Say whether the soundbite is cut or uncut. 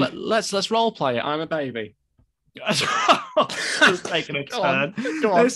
uncut